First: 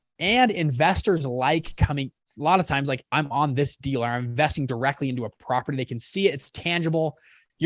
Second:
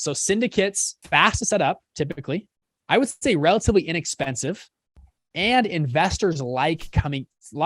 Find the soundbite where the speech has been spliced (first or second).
second